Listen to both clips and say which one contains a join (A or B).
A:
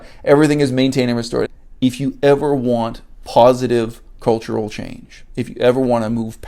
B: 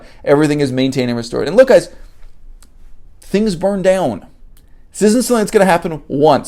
A